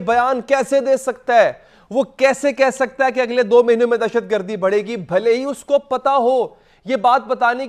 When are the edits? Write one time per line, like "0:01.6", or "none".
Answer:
none

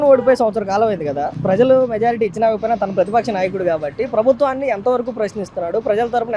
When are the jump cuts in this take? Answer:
none

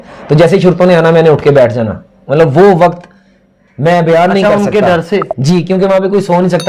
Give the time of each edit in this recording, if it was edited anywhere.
none

